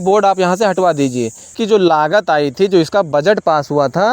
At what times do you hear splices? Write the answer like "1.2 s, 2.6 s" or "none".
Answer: 1.5 s